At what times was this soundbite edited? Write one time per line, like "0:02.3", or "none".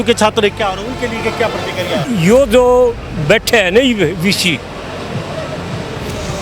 0:02.0